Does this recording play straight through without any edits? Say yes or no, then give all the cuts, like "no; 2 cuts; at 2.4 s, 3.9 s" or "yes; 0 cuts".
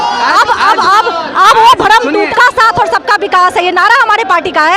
no; 1 cut; at 2.3 s